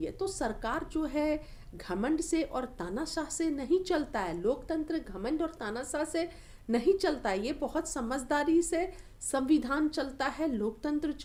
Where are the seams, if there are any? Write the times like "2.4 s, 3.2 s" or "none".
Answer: none